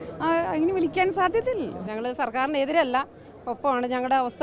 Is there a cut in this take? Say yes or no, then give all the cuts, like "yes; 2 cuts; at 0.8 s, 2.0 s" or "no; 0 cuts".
yes; 1 cut; at 1.8 s